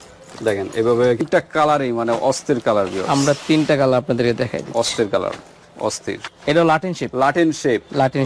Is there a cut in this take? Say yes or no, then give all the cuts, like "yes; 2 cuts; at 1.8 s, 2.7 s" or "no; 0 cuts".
yes; 2 cuts; at 1.2 s, 6.3 s